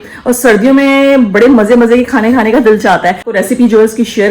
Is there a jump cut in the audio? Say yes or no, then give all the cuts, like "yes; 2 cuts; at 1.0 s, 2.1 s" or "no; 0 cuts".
yes; 1 cut; at 3.3 s